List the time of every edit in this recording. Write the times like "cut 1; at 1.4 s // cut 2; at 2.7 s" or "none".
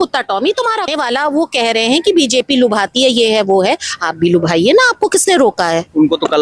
cut 1; at 0.9 s